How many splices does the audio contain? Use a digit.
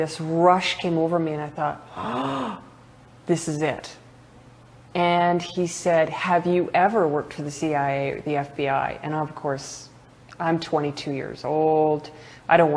0